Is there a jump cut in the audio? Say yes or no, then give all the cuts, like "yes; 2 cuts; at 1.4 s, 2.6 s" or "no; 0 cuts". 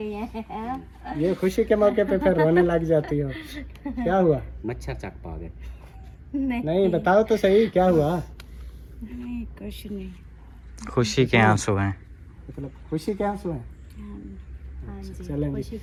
no; 0 cuts